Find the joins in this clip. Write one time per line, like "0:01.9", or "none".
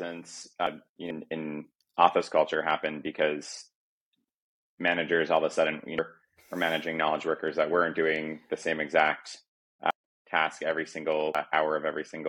0:00.7
0:06.0
0:09.9
0:11.4